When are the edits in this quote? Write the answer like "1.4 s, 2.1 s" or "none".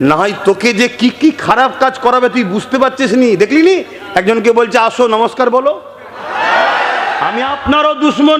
7.3 s

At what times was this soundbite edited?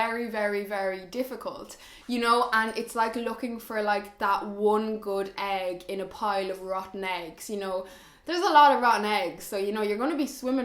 none

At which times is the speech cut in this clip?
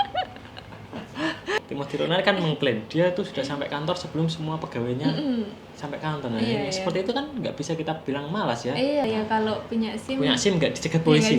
1.6 s, 9.1 s

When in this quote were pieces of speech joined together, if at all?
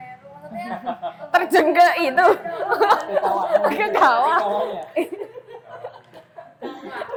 none

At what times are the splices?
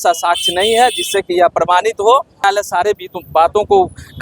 2.4 s

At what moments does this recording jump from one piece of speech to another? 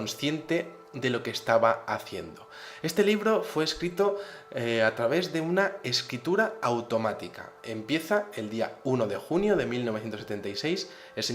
3.0 s

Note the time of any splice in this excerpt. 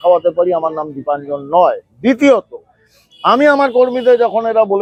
none

